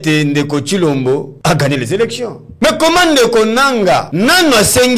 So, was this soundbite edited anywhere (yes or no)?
yes